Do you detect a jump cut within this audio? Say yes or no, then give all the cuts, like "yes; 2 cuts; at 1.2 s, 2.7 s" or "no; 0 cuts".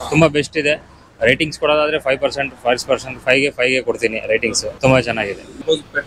no; 0 cuts